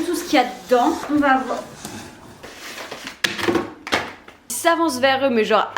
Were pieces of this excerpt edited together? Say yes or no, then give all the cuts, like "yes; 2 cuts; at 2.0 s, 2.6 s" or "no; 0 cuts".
yes; 3 cuts; at 1.0 s, 2.6 s, 4.5 s